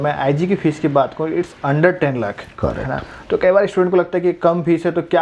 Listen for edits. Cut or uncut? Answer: uncut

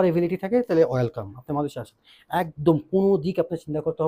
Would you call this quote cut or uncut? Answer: uncut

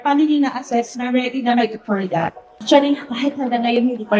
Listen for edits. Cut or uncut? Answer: cut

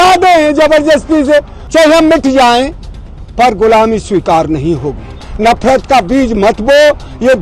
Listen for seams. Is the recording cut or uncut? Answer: cut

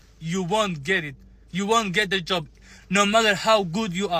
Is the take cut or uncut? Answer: uncut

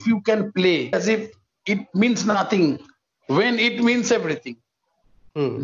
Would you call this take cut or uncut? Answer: cut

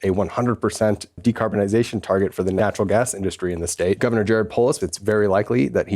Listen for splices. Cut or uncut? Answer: cut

